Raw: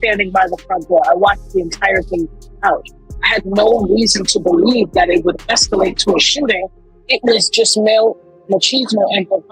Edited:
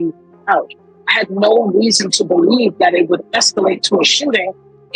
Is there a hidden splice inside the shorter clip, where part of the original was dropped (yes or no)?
no